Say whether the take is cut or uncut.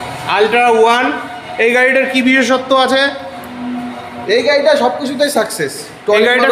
uncut